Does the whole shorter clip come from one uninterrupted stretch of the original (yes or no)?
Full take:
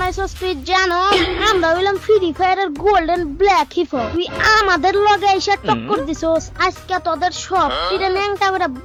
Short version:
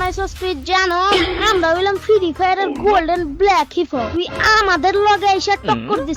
yes